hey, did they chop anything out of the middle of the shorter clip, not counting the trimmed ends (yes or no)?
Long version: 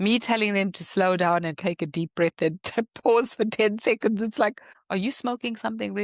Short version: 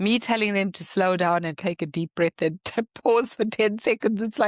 no